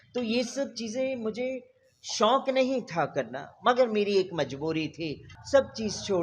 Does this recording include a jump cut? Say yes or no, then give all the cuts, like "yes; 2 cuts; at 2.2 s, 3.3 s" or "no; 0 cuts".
yes; 1 cut; at 5.2 s